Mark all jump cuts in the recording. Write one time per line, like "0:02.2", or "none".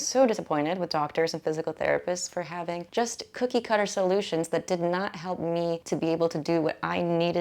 0:02.8
0:05.8